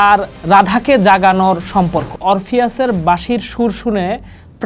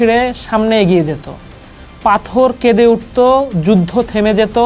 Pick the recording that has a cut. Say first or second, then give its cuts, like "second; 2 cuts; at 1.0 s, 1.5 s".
first; 1 cut; at 2.1 s